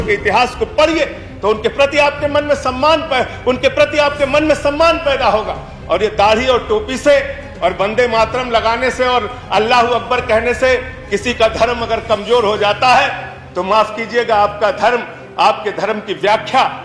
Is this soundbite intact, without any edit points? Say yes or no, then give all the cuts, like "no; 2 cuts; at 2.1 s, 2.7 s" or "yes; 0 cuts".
yes; 0 cuts